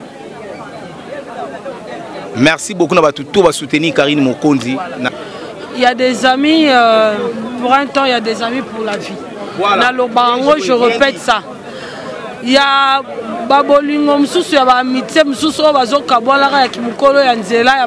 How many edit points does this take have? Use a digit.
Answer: 1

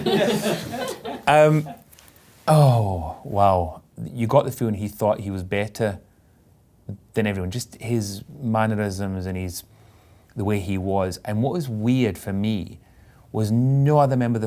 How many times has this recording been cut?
1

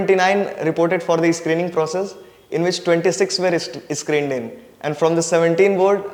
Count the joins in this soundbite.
0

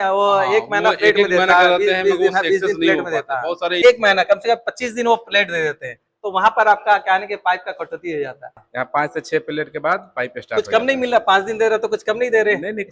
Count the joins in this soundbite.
2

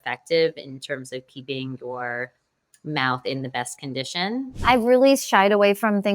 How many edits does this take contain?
1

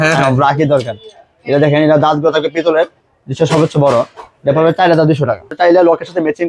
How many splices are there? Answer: 1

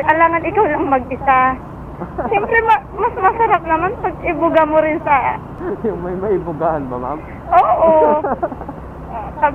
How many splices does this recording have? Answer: 0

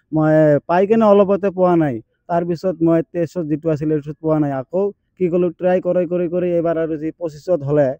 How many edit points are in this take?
0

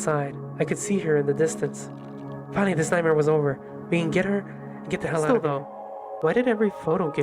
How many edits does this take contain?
1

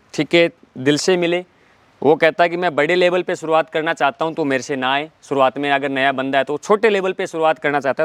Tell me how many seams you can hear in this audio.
0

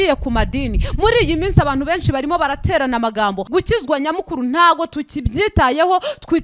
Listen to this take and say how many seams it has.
1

